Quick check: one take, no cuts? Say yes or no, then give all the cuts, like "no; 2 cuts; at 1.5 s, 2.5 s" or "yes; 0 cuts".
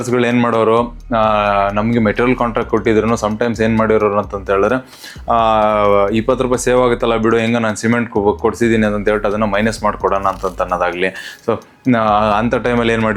yes; 0 cuts